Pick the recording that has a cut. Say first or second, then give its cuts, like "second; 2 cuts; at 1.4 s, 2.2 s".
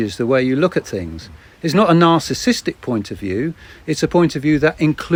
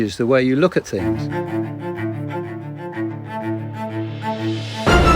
second; 1 cut; at 1.0 s